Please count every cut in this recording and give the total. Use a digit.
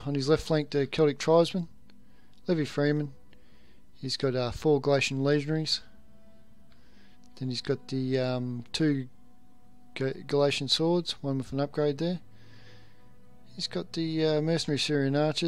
1